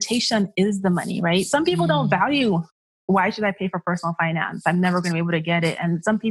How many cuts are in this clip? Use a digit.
0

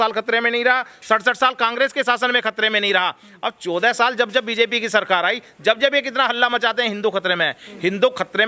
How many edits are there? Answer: 0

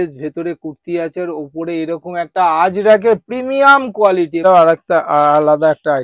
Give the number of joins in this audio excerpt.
1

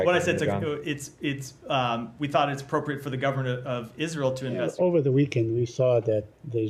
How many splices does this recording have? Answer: 1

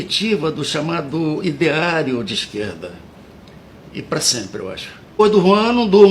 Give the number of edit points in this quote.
1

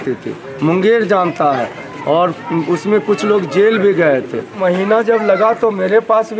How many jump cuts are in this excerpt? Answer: 1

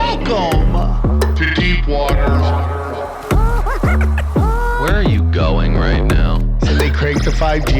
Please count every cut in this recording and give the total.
0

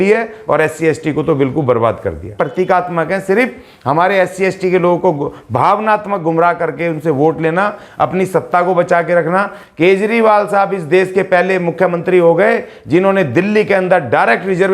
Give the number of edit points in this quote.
1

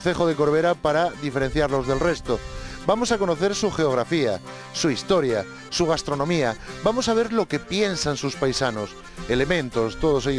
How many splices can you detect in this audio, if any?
1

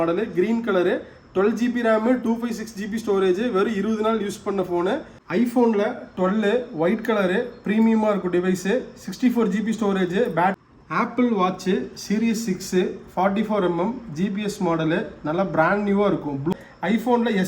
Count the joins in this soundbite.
3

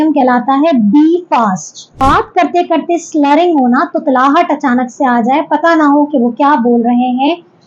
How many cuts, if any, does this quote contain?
1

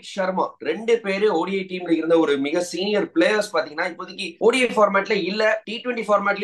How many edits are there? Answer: 0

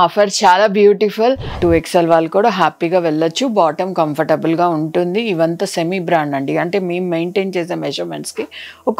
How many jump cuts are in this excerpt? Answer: 1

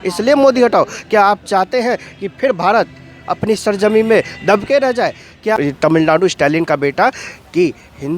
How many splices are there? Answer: 1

